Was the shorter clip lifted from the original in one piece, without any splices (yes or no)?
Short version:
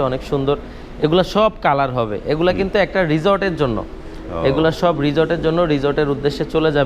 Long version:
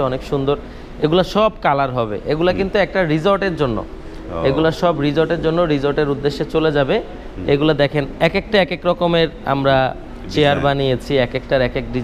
yes